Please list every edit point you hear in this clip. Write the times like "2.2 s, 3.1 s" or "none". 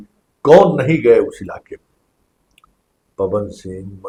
none